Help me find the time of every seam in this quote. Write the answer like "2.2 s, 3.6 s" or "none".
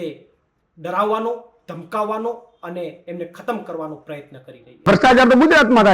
4.8 s